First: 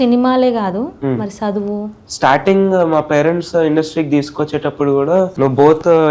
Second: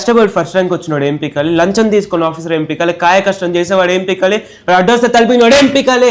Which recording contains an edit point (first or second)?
first